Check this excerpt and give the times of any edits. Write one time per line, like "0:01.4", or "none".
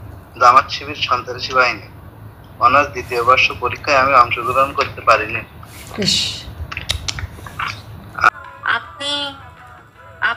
0:08.3